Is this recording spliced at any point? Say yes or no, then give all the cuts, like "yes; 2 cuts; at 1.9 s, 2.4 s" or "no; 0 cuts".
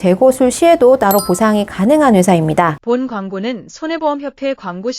yes; 1 cut; at 2.7 s